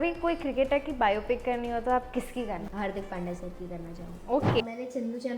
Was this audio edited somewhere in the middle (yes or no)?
yes